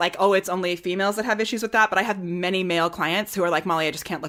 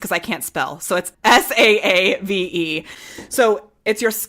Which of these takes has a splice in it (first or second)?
second